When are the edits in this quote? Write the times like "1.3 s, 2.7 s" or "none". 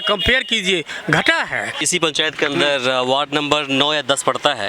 1.8 s